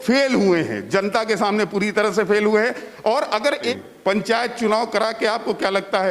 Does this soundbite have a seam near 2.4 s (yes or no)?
no